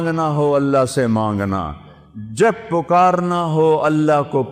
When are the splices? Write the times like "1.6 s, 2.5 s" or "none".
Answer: none